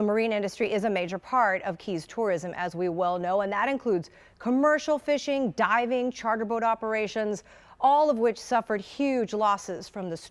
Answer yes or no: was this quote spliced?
yes